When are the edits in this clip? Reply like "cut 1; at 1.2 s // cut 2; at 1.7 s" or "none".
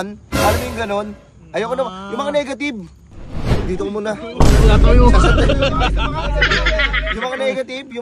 none